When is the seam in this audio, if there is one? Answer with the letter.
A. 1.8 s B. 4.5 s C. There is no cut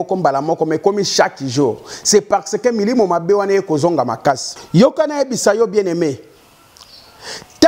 B